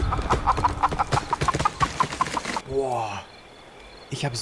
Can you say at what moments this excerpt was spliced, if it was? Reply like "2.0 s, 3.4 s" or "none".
2.7 s